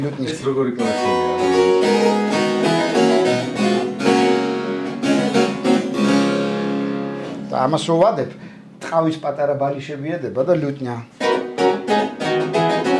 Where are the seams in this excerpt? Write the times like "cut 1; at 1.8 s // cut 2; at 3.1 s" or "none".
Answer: none